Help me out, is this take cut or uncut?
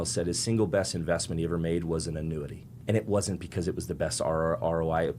cut